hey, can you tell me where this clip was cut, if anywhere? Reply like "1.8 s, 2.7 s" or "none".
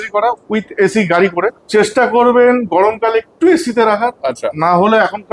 1.6 s